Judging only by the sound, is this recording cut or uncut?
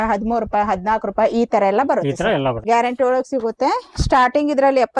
cut